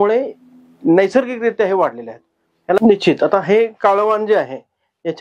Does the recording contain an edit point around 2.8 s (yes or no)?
yes